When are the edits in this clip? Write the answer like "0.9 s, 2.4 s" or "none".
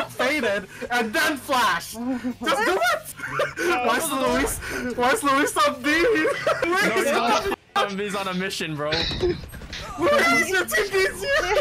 3.2 s, 6.6 s